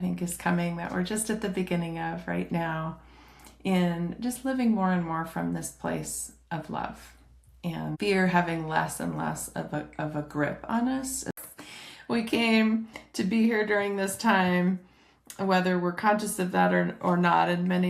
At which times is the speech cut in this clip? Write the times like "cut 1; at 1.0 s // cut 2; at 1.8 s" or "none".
cut 1; at 11.4 s